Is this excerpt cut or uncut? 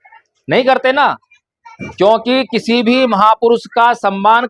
uncut